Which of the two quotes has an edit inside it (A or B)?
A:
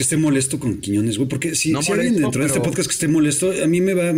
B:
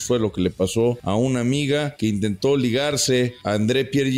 B